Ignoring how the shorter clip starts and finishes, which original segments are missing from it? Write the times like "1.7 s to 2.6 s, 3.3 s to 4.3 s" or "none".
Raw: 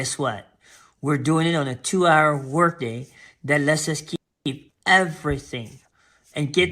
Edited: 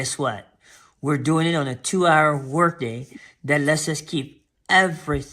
4.4 s to 4.6 s